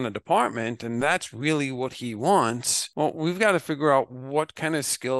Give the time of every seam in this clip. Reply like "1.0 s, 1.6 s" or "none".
none